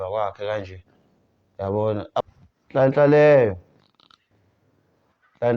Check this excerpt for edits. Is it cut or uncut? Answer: cut